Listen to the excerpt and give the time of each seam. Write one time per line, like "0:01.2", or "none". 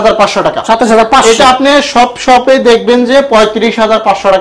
none